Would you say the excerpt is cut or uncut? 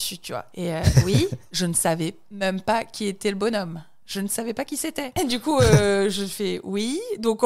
cut